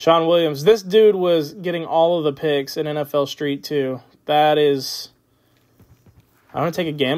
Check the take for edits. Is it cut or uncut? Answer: uncut